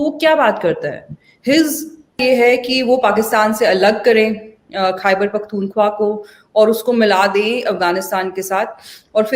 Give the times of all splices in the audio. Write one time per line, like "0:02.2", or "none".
0:02.2